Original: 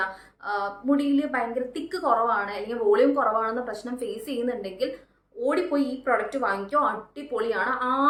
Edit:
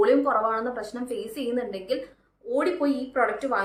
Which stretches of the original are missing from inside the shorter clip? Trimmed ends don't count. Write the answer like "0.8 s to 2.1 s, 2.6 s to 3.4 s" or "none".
none